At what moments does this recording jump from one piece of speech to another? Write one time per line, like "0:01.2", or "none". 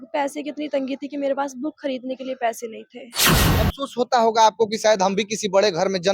0:03.5